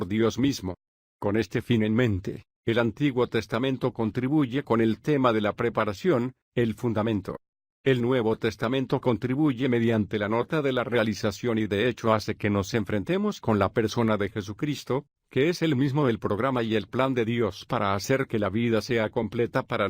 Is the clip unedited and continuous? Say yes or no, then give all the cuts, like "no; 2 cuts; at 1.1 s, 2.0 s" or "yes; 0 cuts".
no; 1 cut; at 18.5 s